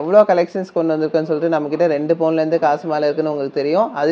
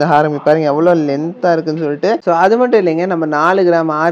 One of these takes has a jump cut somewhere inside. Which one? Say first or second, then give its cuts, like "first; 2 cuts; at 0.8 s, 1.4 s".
second; 1 cut; at 2.2 s